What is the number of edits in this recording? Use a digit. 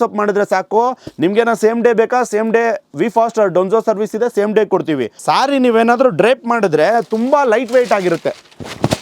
1